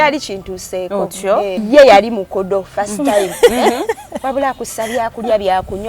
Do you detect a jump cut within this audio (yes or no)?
yes